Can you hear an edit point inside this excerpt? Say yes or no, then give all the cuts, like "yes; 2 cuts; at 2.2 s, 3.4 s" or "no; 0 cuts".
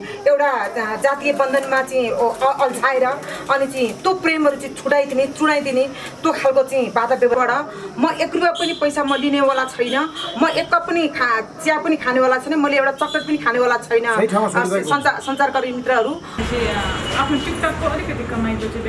yes; 2 cuts; at 7.4 s, 16.4 s